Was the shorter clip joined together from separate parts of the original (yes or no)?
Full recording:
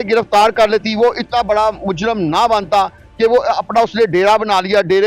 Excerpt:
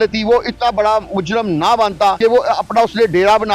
yes